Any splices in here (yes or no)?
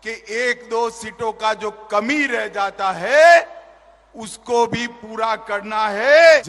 no